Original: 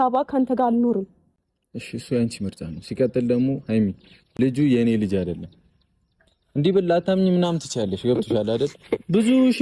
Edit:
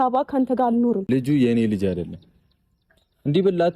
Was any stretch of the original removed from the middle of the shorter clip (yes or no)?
yes